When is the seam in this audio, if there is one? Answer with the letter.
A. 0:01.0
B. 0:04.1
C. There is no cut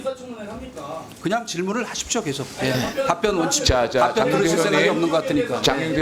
C